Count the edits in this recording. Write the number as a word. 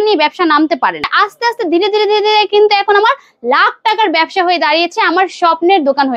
one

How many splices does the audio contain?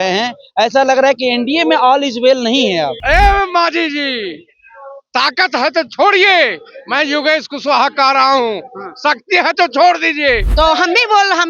two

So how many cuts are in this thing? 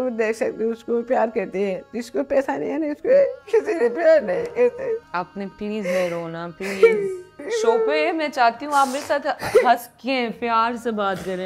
two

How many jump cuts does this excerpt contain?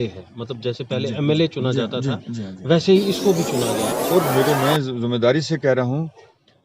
one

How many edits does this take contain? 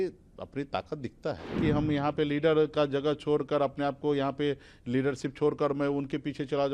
one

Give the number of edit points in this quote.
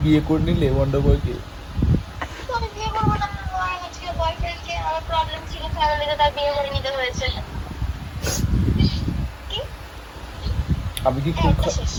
zero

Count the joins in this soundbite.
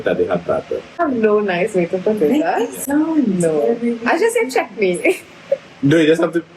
one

